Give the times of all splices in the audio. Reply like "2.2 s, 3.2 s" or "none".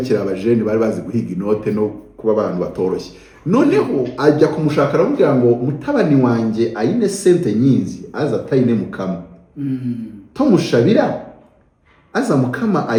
none

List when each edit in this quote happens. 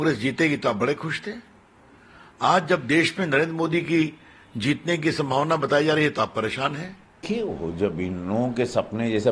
7.3 s

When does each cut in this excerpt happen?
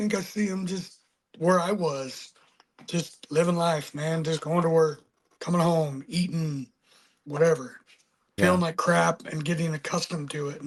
none

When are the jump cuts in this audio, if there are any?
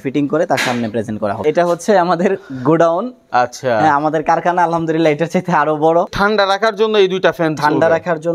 1.4 s, 6.1 s

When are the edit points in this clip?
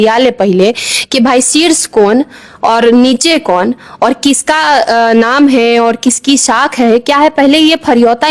none

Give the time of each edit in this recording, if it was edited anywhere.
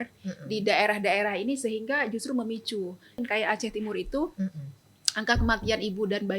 3.2 s

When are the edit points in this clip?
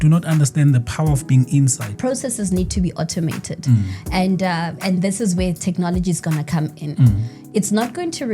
1.9 s

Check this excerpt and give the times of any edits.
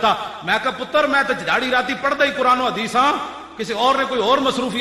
none

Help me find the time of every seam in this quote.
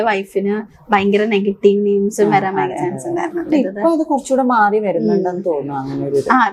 3.5 s

